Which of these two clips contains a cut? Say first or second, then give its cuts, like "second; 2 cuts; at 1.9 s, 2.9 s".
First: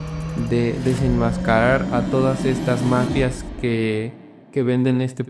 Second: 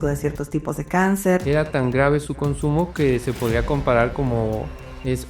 second; 1 cut; at 1.4 s